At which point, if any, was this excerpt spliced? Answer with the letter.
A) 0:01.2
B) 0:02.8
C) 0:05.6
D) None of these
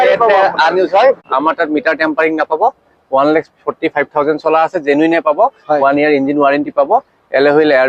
A